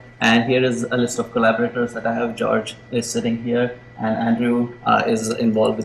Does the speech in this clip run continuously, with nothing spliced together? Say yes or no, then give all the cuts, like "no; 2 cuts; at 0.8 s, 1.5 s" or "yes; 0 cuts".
no; 1 cut; at 2.1 s